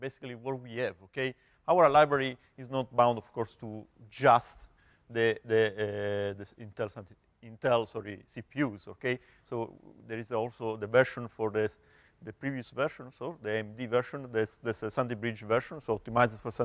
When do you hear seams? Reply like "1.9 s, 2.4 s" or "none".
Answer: 4.5 s